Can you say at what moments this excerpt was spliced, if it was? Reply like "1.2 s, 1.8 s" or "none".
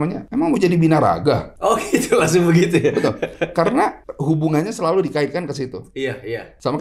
none